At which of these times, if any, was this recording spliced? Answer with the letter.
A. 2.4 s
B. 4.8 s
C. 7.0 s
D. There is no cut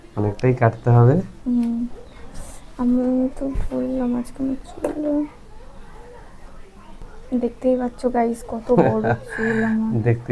C